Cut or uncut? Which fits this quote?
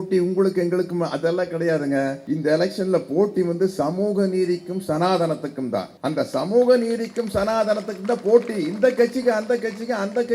cut